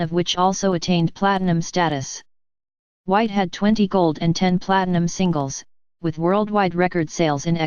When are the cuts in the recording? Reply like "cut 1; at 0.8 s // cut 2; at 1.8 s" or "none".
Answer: cut 1; at 6.0 s